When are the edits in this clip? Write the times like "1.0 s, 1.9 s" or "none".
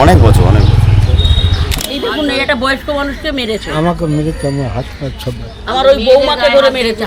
1.8 s